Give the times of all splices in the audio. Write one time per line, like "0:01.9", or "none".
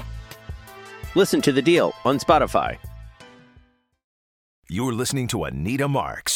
0:04.5